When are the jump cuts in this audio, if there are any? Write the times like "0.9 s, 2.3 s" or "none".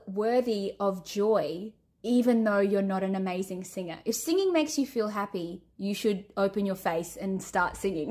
none